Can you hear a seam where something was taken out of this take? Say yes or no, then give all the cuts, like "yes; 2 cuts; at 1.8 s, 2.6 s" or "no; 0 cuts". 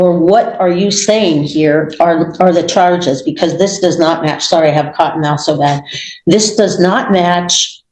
no; 0 cuts